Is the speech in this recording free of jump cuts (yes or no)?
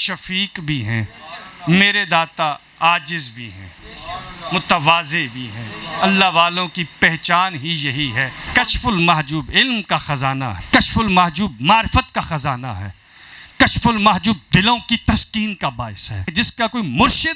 no